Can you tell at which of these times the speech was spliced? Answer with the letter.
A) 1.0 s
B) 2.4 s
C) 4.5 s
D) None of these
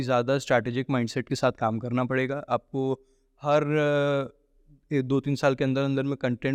D